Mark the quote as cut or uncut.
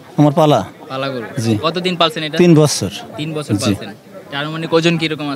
uncut